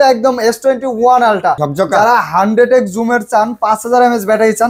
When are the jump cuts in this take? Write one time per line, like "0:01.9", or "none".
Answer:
0:01.6